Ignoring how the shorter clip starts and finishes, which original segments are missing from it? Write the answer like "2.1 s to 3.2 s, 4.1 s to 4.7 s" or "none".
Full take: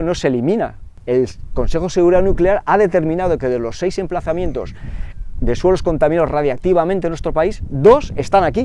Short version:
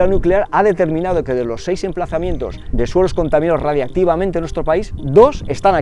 4.8 s to 5.3 s